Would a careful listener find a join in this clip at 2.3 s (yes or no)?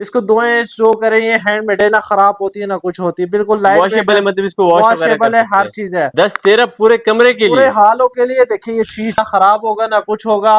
no